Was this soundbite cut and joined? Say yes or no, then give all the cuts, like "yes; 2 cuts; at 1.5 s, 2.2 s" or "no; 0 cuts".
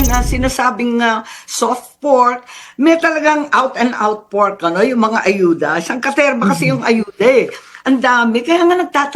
no; 0 cuts